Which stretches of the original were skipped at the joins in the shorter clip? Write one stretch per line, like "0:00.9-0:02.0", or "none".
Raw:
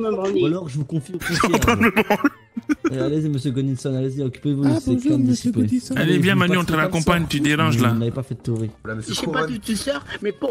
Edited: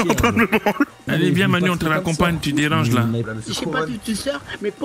0:02.5-0:05.9
0:08.1-0:08.9

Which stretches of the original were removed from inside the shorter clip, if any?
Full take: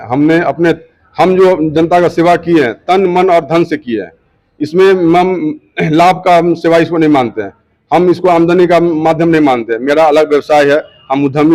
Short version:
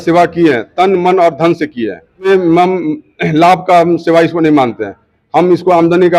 0:04.4-0:04.8

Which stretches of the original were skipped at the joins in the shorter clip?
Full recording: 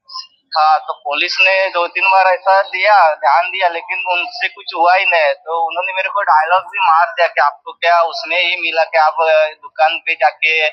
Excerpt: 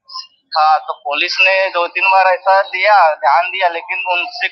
none

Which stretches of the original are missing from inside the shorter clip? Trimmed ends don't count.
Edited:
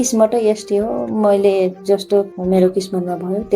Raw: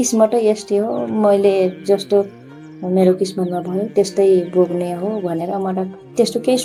0:02.3-0:02.8

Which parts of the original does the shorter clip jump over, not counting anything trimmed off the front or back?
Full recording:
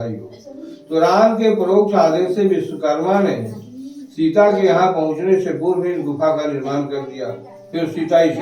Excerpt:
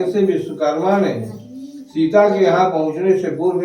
none

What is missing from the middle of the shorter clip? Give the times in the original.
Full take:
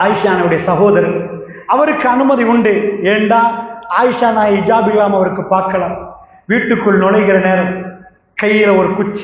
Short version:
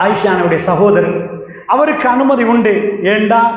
none

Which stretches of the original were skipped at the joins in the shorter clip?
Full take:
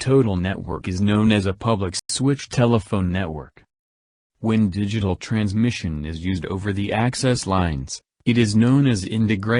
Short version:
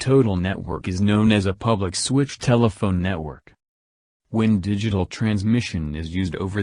0:02.0-0:02.1

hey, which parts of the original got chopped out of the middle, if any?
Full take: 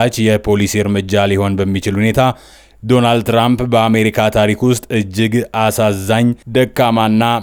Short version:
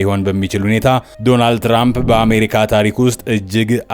0:02.4-0:02.7

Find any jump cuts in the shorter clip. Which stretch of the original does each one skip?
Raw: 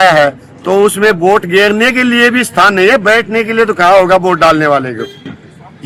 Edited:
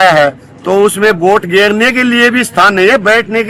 none

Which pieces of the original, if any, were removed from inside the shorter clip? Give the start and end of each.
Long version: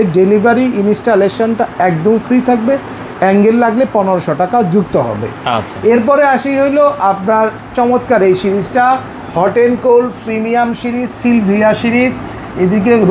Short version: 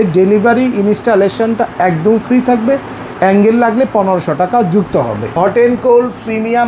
0:05.2-0:09.2

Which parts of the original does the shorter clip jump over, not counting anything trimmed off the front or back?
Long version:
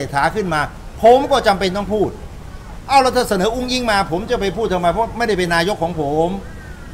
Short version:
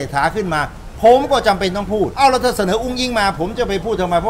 0:02.1-0:02.8

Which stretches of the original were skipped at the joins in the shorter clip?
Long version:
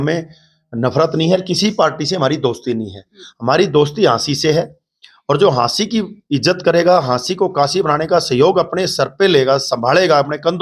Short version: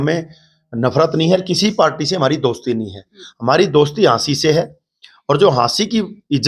none

